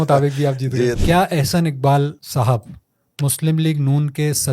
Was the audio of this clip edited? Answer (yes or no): yes